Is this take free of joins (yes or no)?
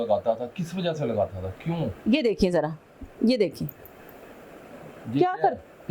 no